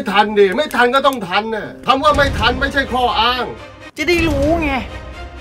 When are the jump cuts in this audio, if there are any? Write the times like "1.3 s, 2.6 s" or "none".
1.7 s, 3.9 s